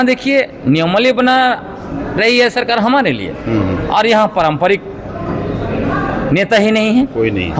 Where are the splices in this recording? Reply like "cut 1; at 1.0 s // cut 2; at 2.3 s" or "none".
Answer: none